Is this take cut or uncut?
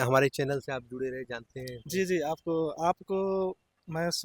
uncut